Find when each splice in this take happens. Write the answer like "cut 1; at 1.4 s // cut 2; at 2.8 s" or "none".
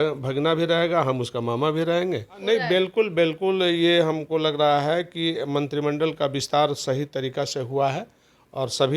cut 1; at 2.4 s